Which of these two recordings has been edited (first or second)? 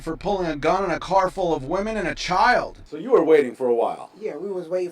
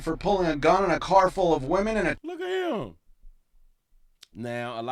first